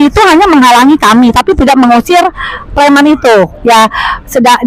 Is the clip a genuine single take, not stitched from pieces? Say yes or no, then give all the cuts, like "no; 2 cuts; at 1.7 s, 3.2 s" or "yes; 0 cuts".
yes; 0 cuts